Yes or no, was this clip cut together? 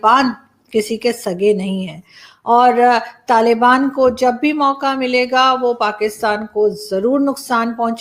no